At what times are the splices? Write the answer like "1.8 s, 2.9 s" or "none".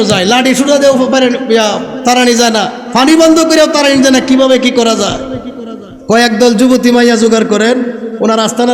none